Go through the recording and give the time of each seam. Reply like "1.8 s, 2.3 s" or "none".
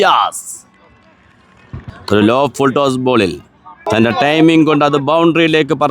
1.9 s, 3.7 s